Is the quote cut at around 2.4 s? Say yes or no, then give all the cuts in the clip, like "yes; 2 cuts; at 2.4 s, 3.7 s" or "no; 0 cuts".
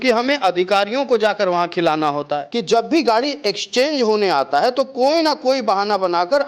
yes; 1 cut; at 2.4 s